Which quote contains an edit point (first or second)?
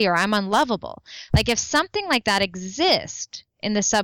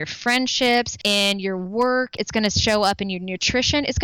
second